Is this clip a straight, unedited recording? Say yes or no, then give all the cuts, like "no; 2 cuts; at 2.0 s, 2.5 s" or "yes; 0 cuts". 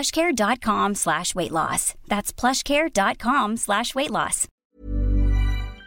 no; 1 cut; at 4.4 s